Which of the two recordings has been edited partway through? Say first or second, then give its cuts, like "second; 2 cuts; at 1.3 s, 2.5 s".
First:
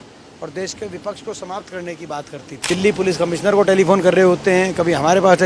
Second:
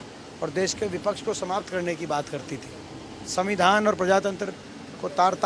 first; 1 cut; at 2.6 s